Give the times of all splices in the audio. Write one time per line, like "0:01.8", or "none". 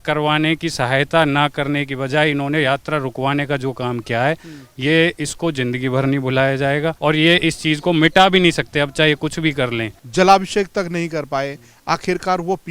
0:07.0
0:09.9